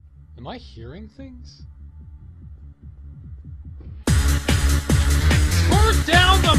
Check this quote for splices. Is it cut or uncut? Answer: uncut